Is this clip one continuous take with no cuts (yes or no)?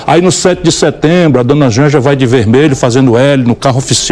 yes